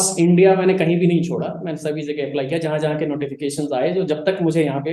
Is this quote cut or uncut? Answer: uncut